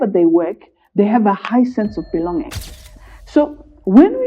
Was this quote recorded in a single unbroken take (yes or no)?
no